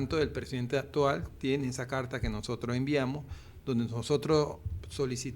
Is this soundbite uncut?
yes; 0 cuts

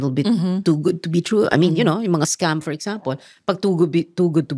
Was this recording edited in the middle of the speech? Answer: no; 0 cuts

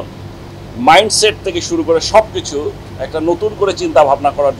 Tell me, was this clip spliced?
no; 0 cuts

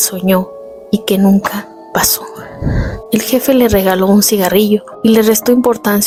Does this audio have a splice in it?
no; 0 cuts

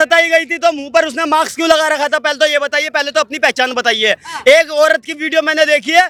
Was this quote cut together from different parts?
no; 0 cuts

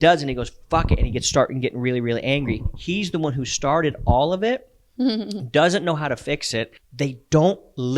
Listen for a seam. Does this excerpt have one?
yes; 1 cut; at 6.8 s

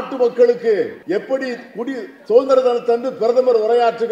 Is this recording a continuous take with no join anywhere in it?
no; 1 cut; at 1.0 s

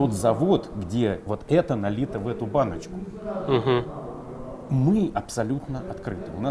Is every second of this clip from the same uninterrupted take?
yes; 0 cuts

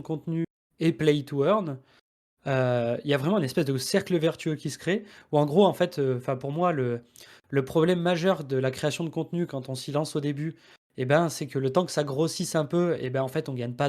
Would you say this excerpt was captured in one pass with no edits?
yes; 0 cuts

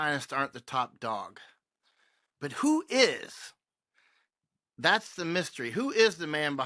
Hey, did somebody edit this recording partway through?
no; 0 cuts

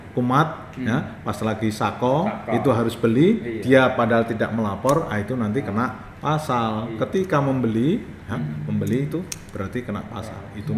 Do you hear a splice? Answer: no; 0 cuts

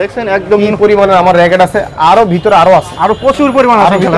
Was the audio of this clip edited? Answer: no; 0 cuts

